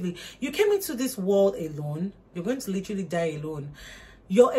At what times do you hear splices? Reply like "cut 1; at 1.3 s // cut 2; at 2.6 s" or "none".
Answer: none